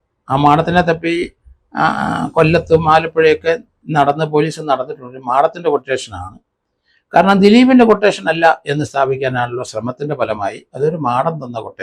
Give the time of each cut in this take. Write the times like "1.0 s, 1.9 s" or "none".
none